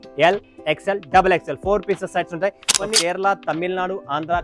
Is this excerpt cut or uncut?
cut